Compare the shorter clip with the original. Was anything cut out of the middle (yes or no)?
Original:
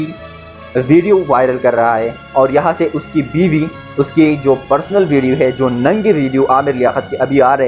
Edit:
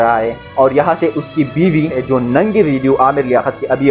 yes